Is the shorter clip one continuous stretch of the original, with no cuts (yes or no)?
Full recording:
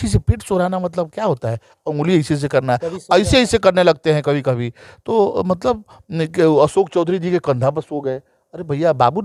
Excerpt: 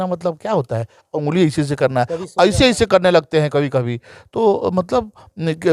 yes